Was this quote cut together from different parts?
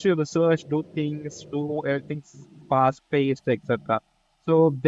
no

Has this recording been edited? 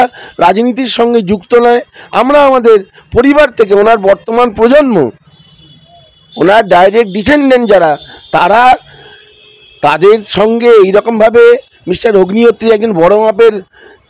no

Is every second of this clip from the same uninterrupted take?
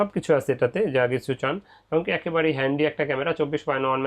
yes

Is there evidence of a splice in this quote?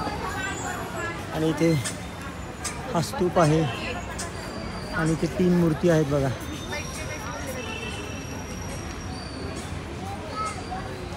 no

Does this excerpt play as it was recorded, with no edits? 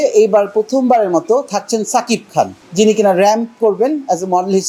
yes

